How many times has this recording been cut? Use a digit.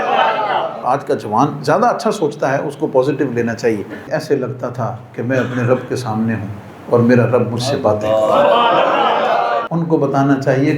3